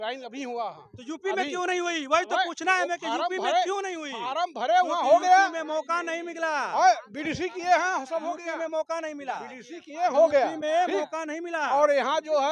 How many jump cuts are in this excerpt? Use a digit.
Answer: 0